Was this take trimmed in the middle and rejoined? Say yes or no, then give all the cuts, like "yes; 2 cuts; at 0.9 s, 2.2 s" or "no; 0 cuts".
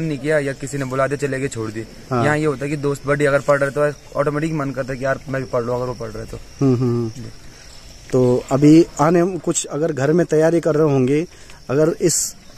no; 0 cuts